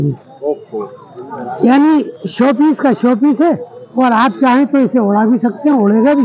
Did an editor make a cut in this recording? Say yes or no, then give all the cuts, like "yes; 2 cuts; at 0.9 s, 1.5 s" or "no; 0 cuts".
no; 0 cuts